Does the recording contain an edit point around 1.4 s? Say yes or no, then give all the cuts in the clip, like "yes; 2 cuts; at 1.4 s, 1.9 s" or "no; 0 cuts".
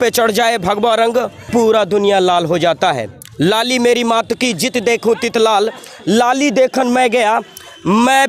yes; 1 cut; at 1.4 s